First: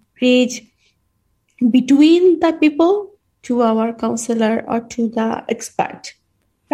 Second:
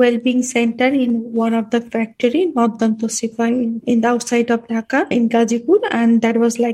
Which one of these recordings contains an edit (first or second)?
second